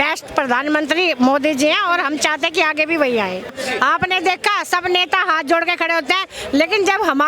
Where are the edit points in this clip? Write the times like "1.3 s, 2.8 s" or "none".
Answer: 3.5 s